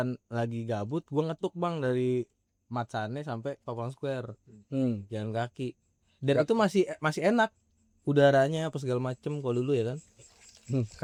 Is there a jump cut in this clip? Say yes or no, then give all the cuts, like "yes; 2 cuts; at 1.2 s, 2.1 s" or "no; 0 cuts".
no; 0 cuts